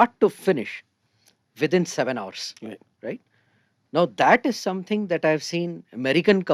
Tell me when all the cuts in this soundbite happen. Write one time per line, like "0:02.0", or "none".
none